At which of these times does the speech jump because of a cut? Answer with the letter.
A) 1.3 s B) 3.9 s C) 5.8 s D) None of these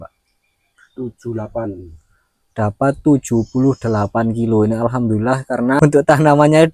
C